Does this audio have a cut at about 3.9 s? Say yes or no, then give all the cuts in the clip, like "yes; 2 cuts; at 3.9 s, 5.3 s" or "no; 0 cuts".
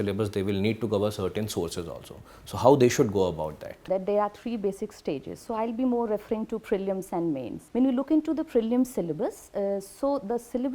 yes; 2 cuts; at 3.9 s, 7.6 s